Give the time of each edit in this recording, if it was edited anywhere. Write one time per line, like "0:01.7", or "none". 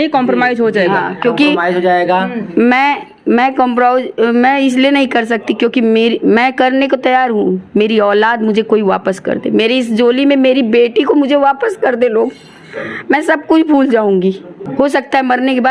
0:14.6

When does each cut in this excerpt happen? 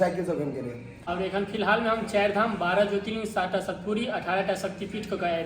0:01.1

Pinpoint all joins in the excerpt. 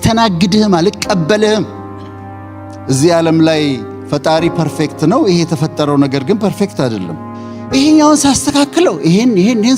0:02.4

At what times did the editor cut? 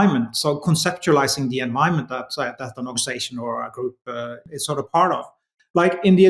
0:04.4

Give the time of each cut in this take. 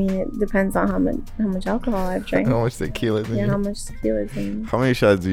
none

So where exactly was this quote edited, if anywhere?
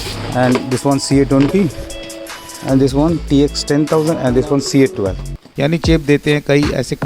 0:05.4

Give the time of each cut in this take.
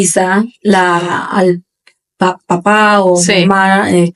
none

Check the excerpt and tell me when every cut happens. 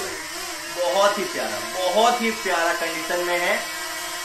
none

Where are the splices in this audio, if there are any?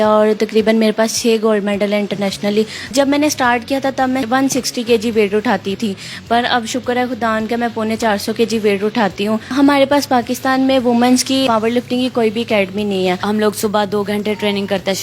0:02.9
0:04.2
0:05.8
0:09.5
0:11.4
0:13.2

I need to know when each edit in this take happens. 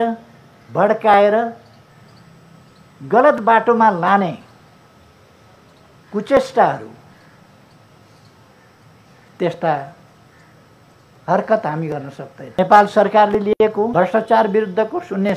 0:12.4
0:13.9

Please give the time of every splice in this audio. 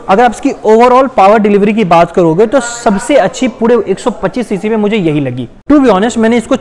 0:05.5

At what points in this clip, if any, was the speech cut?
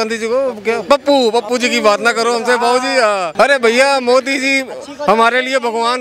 0:03.3

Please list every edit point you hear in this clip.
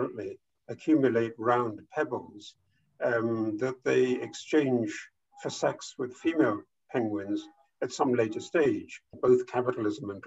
0:09.2

